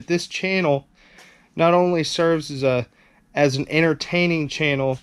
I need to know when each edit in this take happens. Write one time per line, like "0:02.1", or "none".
none